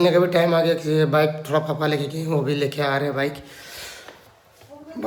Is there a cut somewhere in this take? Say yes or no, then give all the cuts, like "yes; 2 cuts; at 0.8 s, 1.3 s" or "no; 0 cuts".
no; 0 cuts